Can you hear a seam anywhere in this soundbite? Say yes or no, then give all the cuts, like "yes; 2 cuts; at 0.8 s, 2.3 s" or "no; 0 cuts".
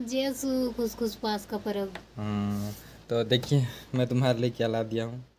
no; 0 cuts